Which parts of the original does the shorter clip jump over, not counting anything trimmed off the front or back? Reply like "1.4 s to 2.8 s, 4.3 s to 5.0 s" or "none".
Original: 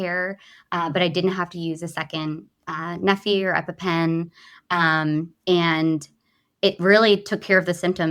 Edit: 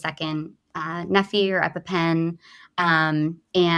none